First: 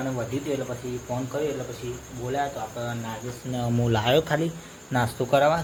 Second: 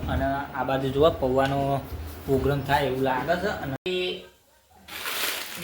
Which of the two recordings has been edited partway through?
second; 1 cut; at 3.8 s

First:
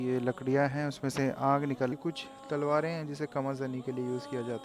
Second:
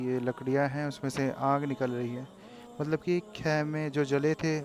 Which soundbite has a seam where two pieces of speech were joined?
first; 1 cut; at 1.9 s

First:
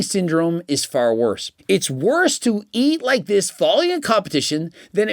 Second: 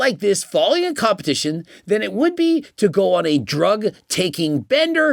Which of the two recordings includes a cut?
first; 1 cut; at 1.5 s

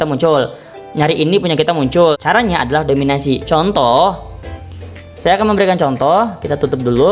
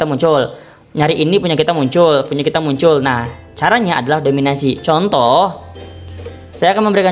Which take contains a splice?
first; 1 cut; at 2.2 s

